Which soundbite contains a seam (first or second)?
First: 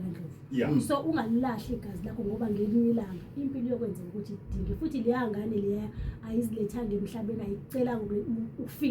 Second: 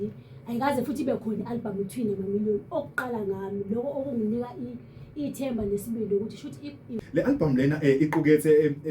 second